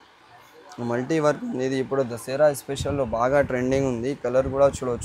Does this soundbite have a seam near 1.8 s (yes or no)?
no